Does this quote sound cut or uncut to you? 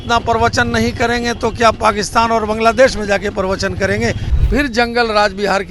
cut